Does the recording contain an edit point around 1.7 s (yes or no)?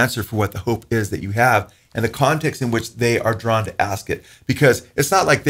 no